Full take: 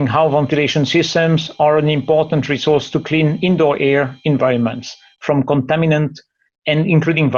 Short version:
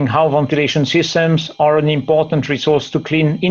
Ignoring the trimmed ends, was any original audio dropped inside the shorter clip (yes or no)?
no